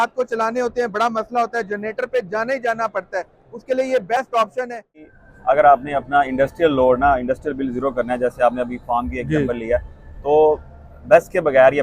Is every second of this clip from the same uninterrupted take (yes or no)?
no